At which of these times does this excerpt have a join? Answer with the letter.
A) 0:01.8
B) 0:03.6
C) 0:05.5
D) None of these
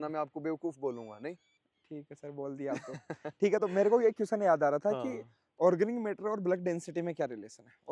D